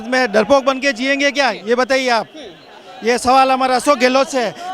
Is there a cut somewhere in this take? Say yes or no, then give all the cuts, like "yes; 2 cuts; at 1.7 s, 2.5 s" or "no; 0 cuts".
no; 0 cuts